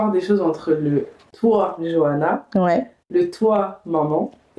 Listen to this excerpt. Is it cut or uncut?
uncut